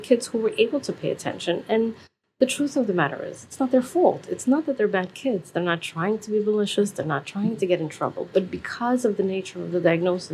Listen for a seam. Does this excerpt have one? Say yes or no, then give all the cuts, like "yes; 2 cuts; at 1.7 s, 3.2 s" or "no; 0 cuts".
no; 0 cuts